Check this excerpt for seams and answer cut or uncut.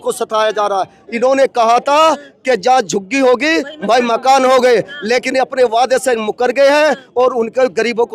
cut